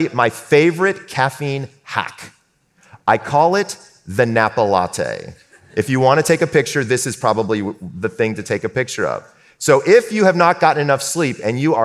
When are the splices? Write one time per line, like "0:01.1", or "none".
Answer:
none